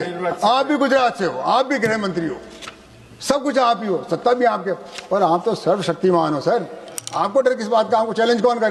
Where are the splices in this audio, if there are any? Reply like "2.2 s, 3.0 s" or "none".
none